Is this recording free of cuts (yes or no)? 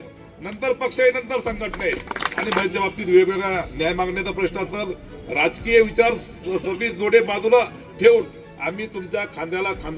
no